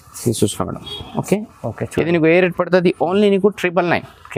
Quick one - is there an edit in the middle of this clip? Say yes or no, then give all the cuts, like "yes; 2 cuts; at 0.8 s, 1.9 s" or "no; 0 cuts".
no; 0 cuts